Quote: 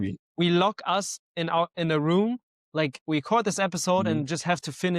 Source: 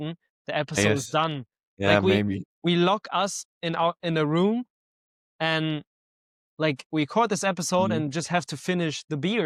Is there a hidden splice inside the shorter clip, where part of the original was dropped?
yes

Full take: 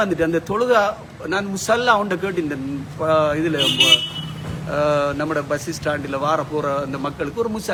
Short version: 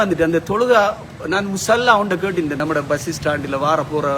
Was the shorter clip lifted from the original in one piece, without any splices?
no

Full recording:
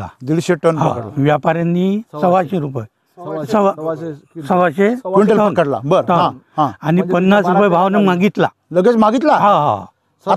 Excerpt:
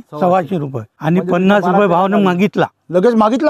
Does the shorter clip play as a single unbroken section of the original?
no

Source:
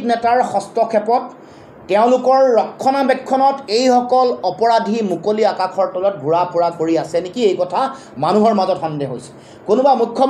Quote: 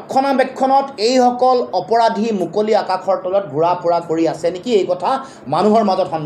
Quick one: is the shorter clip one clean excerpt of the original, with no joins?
yes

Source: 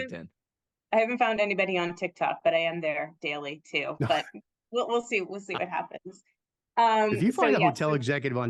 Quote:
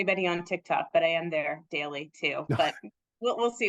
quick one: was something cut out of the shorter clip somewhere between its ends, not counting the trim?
no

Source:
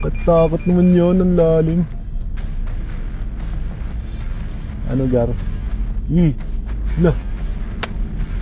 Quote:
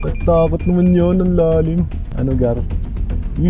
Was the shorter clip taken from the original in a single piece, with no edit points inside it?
no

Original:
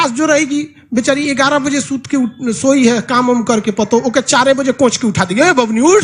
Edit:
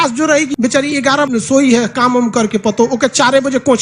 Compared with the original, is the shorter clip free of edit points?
no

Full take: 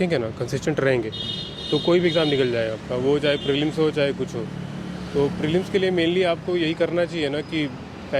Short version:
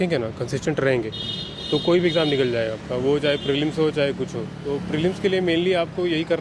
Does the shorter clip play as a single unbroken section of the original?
no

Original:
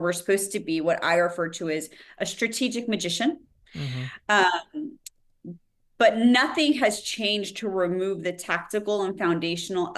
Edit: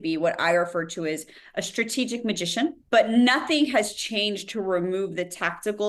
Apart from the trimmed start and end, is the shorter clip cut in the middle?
yes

